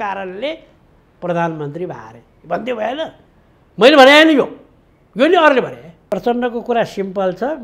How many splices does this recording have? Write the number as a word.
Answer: one